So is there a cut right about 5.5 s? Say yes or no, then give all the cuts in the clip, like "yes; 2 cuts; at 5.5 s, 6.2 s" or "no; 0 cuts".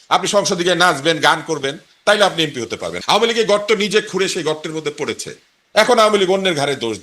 no; 1 cut; at 2.9 s